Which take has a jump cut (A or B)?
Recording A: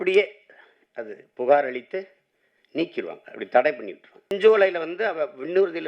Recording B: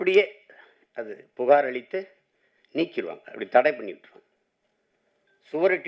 A